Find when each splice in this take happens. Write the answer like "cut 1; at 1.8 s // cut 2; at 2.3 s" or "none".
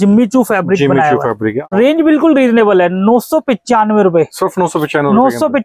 cut 1; at 1.7 s